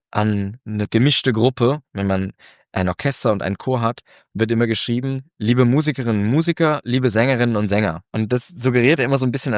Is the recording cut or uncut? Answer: cut